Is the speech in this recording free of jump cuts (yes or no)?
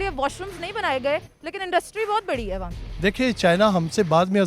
no